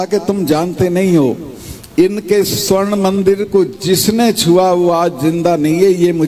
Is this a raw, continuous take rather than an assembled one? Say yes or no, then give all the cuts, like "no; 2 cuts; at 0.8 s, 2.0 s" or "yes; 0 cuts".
yes; 0 cuts